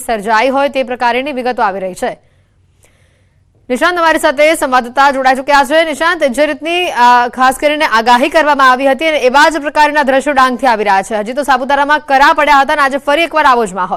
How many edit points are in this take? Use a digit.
0